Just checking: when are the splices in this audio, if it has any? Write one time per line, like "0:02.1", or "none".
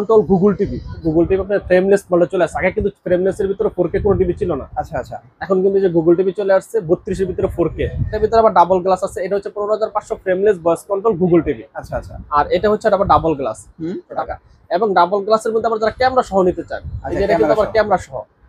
0:01.0
0:08.2
0:14.1